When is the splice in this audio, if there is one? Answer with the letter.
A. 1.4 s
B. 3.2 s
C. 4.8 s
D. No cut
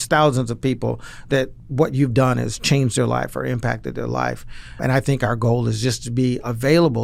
C